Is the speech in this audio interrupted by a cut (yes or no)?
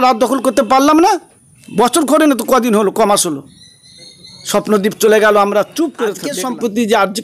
yes